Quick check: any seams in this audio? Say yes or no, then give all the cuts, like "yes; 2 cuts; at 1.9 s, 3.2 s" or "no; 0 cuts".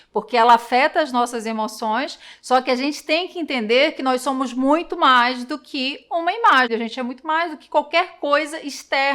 yes; 1 cut; at 6.7 s